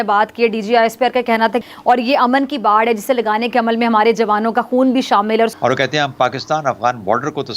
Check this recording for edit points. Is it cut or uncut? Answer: cut